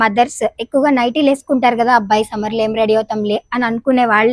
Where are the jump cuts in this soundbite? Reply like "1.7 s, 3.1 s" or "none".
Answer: none

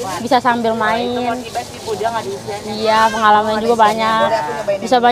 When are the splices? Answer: none

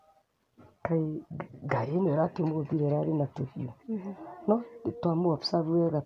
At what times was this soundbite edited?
none

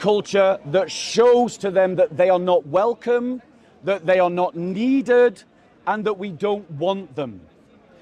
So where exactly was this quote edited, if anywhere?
none

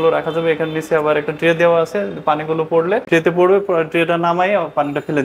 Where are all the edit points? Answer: 3.0 s

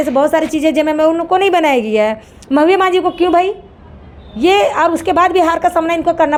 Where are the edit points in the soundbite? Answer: none

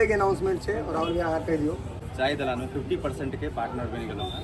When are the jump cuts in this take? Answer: 2.0 s

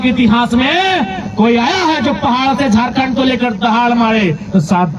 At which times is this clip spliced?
none

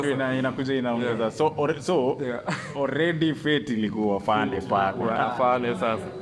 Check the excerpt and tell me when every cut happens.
none

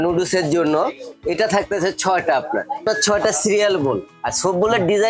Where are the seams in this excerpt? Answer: 2.8 s, 4.2 s

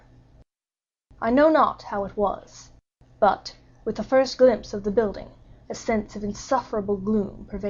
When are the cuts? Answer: none

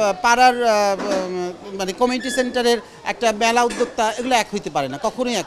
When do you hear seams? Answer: none

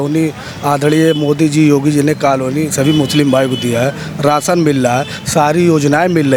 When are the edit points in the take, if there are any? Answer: none

